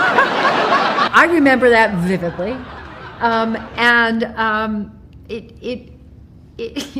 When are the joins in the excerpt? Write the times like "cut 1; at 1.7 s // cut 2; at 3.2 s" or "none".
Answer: cut 1; at 1.1 s